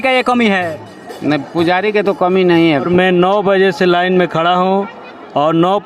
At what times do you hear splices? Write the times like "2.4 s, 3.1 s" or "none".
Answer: 2.9 s